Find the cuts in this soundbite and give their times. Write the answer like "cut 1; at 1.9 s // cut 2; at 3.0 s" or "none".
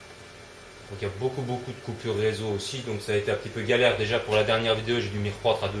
cut 1; at 3.5 s